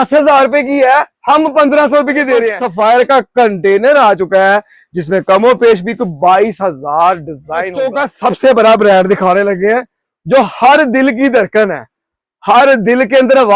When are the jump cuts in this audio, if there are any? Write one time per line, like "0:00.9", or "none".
0:02.6
0:07.8